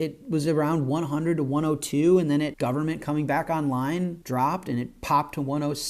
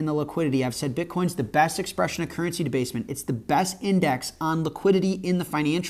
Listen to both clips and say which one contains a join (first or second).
first